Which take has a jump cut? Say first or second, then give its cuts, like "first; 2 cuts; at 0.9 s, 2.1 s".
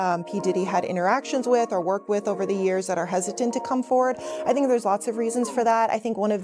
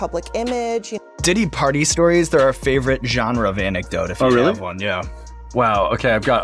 second; 1 cut; at 1.1 s